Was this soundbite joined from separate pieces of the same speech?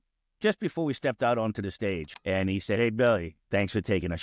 yes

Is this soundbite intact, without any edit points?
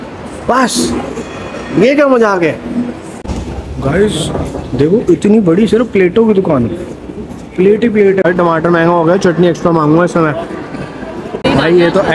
no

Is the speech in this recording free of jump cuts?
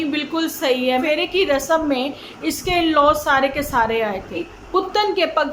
no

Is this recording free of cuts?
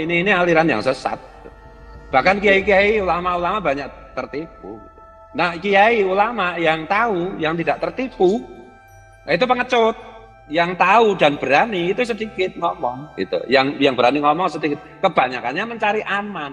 no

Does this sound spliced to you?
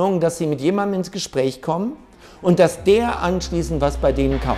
no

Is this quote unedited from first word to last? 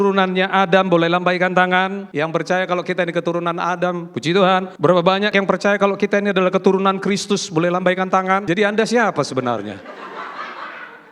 no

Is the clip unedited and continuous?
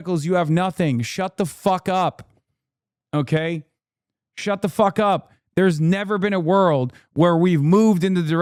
yes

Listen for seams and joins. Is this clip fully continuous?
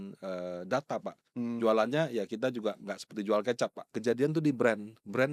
no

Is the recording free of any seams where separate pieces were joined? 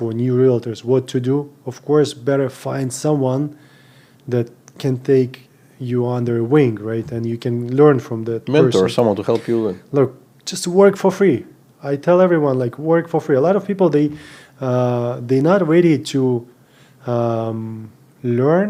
yes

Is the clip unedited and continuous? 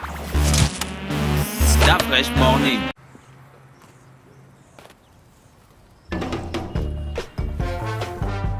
no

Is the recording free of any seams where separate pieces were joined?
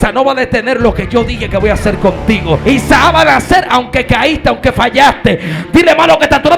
no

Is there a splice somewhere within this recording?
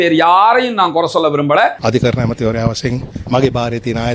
yes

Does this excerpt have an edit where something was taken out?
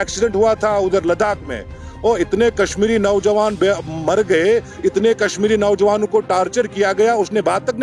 no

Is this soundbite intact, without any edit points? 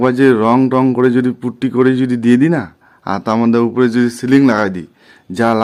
yes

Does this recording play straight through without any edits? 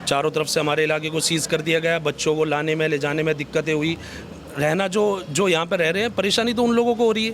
yes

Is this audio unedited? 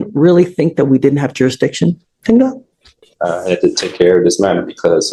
yes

